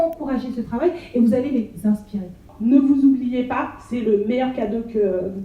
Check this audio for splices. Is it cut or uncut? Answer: cut